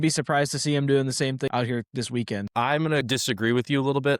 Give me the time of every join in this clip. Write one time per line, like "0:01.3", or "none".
0:01.5
0:02.6